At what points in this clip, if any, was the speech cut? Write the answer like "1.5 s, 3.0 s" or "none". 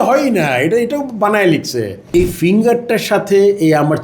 1.9 s